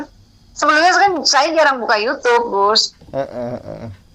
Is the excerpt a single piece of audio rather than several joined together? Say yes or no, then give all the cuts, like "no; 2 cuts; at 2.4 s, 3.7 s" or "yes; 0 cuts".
yes; 0 cuts